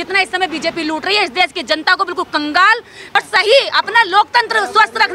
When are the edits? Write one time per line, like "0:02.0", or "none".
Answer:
0:03.2